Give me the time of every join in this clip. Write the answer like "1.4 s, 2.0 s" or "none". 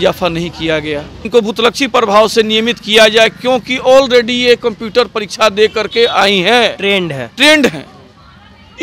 1.2 s